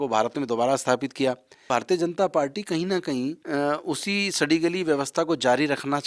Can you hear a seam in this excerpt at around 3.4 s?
yes; 2 cuts; at 1.5 s, 3.4 s

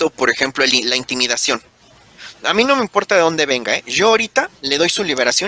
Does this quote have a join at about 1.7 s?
no; 0 cuts

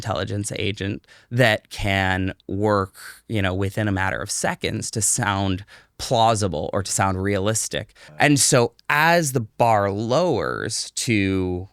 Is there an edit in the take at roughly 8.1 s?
yes; 1 cut; at 8.1 s

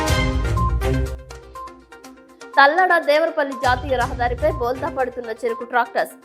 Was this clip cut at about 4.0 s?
no; 1 cut; at 0.9 s

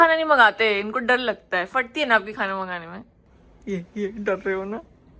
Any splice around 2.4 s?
no; 0 cuts

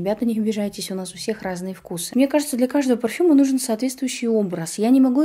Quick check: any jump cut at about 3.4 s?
no; 1 cut; at 2.1 s

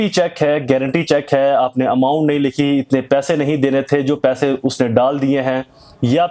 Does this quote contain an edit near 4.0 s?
no; 0 cuts

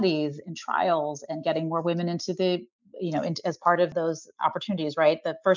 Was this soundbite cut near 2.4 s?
no; 1 cut; at 3.9 s

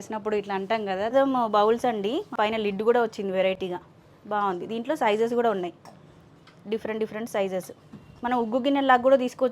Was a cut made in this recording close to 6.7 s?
no; 2 cuts; at 1.1 s, 2.3 s

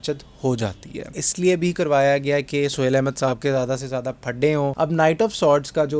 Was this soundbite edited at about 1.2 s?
yes; 2 cuts; at 1.2 s, 4.7 s

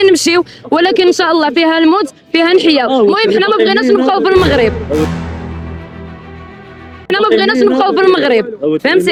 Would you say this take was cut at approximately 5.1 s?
no; 0 cuts

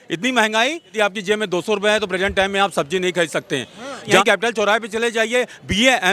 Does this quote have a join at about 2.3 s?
no; 2 cuts; at 0.9 s, 4.2 s

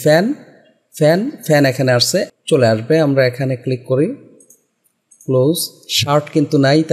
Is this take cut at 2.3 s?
yes; 1 cut; at 2.3 s

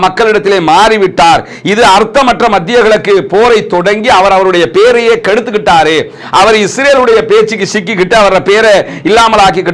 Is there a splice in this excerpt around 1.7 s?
no; 0 cuts

